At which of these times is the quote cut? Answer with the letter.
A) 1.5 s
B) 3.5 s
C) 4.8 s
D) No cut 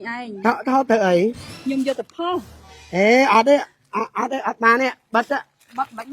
A